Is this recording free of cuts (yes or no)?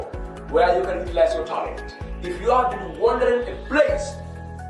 yes